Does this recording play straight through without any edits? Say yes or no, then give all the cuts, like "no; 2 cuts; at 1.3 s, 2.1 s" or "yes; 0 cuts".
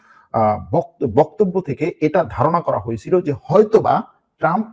yes; 0 cuts